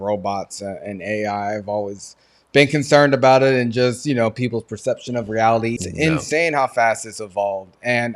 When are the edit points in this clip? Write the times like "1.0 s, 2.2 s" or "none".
5.8 s